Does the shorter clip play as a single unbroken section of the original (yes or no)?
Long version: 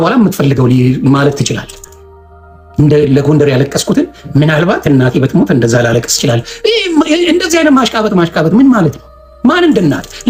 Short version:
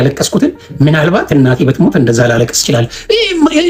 yes